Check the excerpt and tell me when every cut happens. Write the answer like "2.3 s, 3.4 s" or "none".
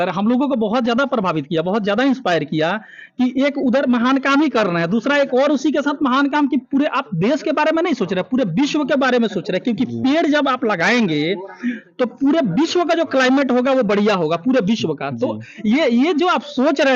none